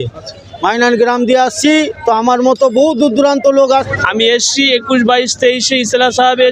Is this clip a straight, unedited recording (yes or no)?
no